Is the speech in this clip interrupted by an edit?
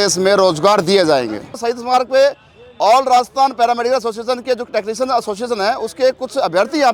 yes; 1 cut; at 1.6 s

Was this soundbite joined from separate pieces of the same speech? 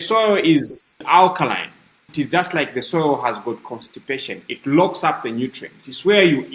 yes; 2 cuts; at 1.0 s, 2.1 s

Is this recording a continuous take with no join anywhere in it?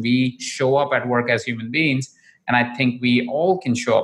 yes; 0 cuts

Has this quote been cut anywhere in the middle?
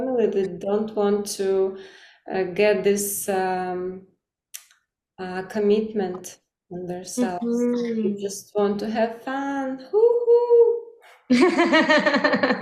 no; 0 cuts

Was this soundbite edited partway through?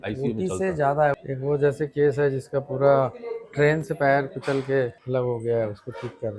yes; 2 cuts; at 1.2 s, 5.0 s

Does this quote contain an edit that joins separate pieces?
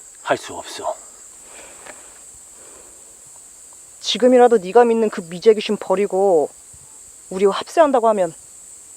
yes; 1 cut; at 1.3 s

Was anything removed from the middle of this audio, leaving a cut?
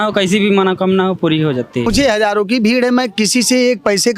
yes; 1 cut; at 1.8 s

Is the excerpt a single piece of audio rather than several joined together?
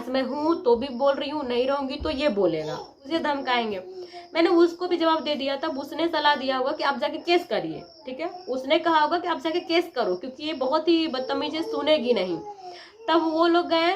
no; 1 cut; at 3.0 s

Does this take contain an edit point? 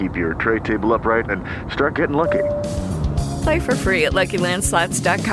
no; 0 cuts

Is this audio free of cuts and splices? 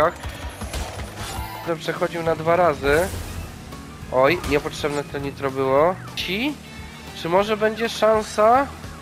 no; 2 cuts; at 1.7 s, 6.2 s

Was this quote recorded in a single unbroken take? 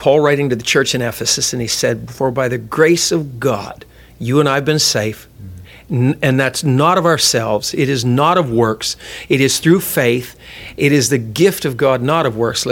yes; 0 cuts

